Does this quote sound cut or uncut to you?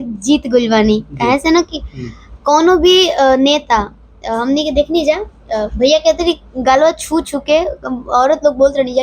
uncut